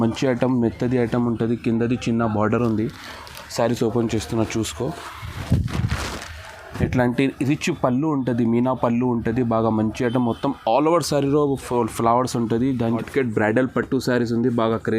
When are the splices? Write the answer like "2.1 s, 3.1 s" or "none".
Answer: 13.1 s